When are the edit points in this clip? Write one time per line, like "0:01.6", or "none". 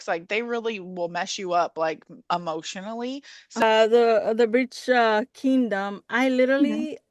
0:03.6